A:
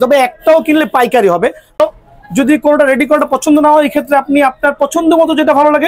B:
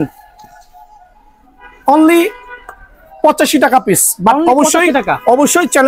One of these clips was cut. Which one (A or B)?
A